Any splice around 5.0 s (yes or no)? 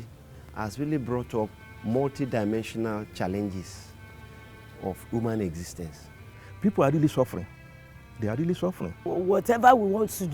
no